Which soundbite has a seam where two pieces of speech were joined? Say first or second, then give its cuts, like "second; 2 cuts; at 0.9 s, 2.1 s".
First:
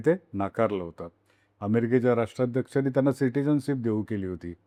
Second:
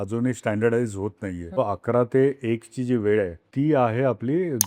second; 2 cuts; at 1.6 s, 3.4 s